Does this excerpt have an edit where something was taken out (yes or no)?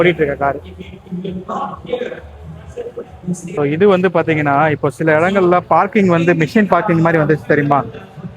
yes